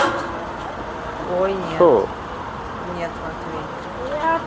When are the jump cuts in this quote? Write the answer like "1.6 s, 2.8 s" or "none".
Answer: none

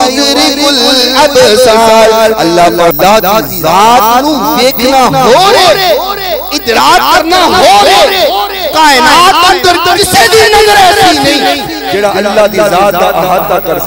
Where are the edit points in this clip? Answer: 2.9 s

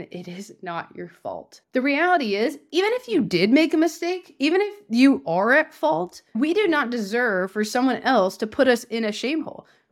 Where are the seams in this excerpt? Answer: 1.6 s, 6.3 s

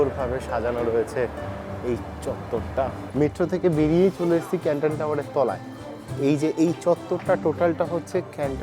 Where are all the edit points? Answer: 3.0 s

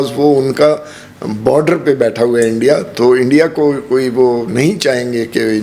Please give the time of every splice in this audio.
none

